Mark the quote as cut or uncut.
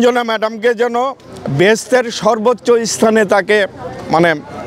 uncut